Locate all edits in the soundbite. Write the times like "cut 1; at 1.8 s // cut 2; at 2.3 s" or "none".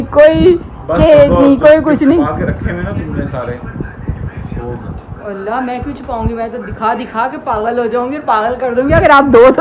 none